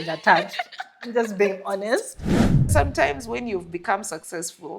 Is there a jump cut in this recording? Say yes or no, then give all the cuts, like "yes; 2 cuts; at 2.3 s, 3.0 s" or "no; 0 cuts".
yes; 1 cut; at 2.7 s